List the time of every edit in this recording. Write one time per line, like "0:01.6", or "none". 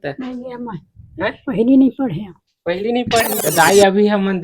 0:03.4